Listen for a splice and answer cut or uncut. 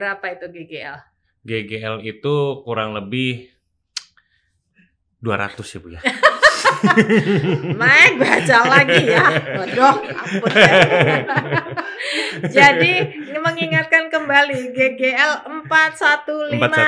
uncut